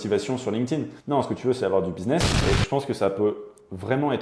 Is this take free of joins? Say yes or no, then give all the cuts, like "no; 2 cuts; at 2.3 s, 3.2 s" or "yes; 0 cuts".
no; 2 cuts; at 0.9 s, 2.3 s